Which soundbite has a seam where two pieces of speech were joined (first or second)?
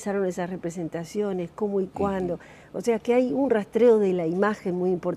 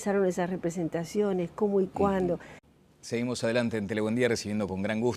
first